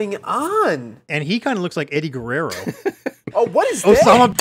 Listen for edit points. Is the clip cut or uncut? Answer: cut